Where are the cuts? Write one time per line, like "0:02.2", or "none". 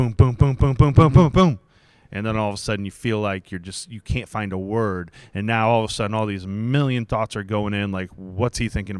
none